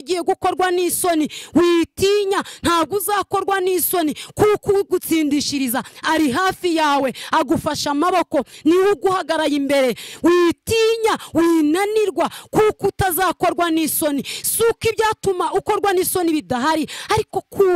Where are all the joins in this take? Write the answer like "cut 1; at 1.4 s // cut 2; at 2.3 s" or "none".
none